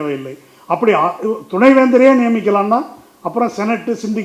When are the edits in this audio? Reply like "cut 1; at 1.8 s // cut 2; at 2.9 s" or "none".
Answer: none